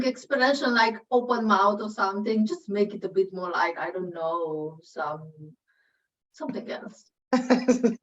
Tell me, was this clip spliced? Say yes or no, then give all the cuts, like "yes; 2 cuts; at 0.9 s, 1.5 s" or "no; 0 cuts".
yes; 1 cut; at 7.1 s